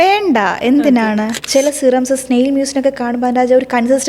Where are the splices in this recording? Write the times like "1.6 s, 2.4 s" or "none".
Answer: 1.4 s